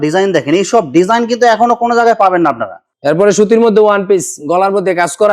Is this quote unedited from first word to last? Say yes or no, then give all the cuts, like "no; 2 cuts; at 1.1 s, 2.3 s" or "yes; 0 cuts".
no; 1 cut; at 2.8 s